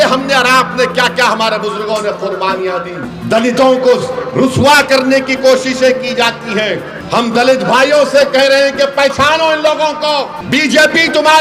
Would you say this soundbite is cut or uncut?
cut